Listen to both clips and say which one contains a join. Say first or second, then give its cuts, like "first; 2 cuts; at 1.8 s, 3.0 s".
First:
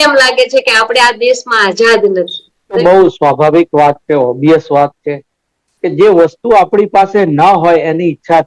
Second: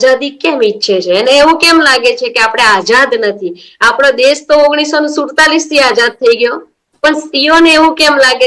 first; 1 cut; at 2.8 s